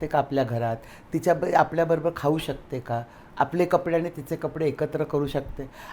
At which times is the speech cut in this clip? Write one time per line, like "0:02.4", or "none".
none